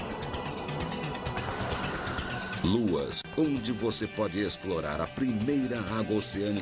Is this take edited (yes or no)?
yes